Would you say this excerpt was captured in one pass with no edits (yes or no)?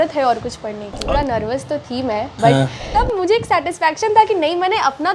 no